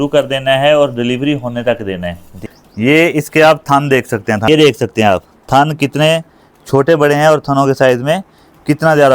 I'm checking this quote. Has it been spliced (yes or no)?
yes